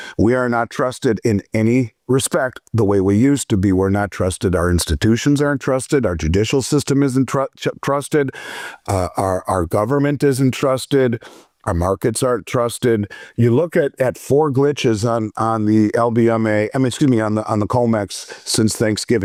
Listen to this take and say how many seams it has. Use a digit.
0